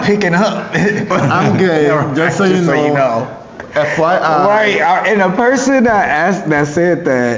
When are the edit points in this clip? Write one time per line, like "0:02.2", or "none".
0:01.1

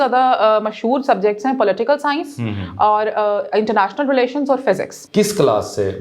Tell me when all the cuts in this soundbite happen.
0:05.0

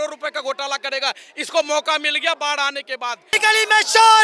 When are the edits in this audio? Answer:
0:03.2

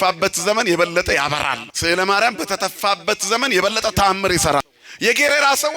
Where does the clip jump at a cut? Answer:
0:01.7
0:04.6

